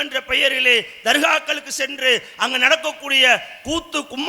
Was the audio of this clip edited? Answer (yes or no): no